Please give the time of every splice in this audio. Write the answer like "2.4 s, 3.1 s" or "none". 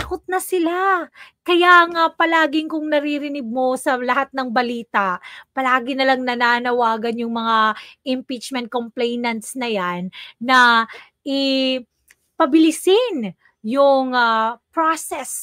none